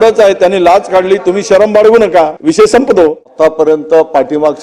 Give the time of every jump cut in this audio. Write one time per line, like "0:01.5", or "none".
0:02.4
0:03.2